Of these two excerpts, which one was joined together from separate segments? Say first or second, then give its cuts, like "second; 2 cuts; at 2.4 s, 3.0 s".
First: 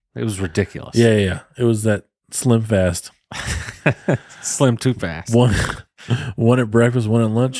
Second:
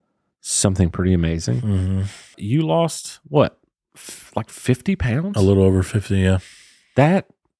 second; 1 cut; at 2.4 s